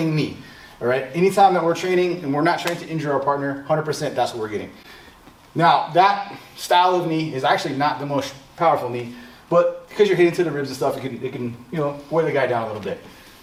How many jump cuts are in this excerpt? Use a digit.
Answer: 0